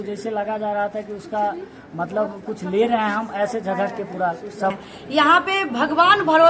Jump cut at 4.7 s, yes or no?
yes